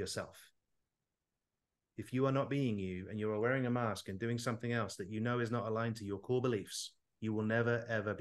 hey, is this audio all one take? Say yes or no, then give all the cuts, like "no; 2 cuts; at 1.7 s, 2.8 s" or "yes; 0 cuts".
yes; 0 cuts